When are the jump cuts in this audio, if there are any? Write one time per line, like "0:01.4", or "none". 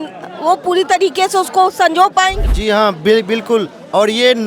0:02.5